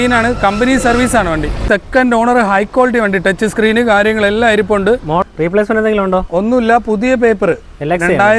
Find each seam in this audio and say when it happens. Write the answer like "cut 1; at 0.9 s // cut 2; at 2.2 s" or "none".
cut 1; at 1.6 s // cut 2; at 5.2 s